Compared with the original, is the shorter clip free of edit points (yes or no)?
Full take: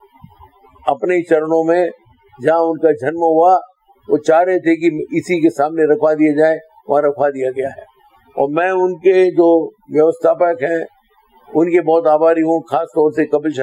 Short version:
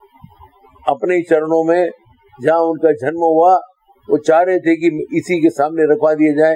yes